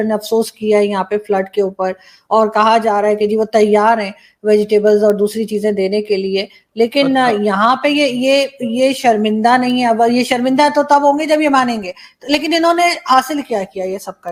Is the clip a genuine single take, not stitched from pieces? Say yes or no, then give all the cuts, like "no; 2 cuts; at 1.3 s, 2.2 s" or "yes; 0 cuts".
yes; 0 cuts